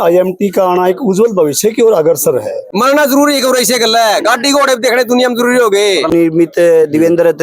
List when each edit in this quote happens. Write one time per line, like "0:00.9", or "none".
0:02.6
0:06.1